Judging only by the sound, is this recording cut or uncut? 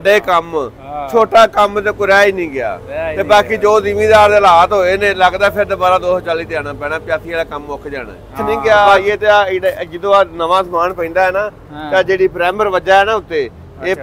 cut